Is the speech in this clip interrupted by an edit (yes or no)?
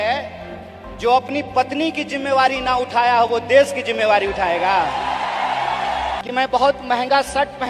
yes